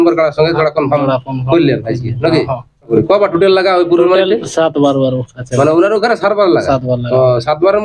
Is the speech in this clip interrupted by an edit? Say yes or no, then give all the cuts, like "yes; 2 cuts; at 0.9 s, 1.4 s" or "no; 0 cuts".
yes; 1 cut; at 2.9 s